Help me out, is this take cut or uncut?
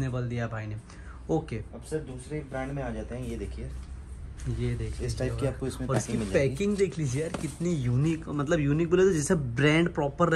uncut